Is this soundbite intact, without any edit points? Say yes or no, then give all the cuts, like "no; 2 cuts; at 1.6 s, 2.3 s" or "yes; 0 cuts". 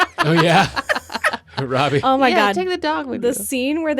yes; 0 cuts